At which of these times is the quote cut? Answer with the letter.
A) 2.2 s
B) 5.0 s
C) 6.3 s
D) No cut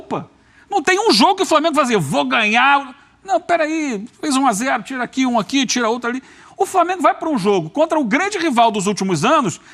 D